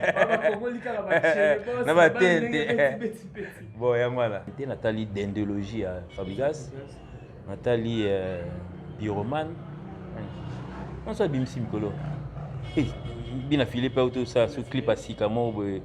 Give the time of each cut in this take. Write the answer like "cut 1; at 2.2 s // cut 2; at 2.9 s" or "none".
cut 1; at 4.5 s